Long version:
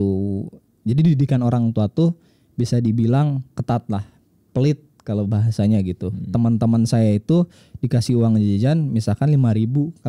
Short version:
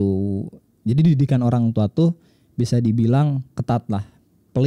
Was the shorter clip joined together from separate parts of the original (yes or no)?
no